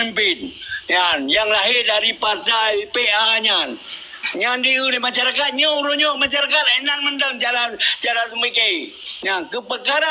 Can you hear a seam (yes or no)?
no